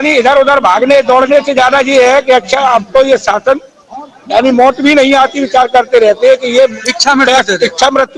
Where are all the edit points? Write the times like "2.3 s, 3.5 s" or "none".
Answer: none